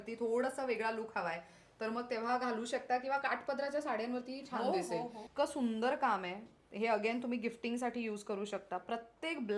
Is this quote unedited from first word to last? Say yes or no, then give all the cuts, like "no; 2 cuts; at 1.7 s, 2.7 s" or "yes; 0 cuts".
no; 1 cut; at 5.2 s